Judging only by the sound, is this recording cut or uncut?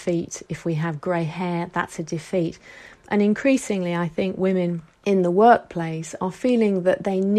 cut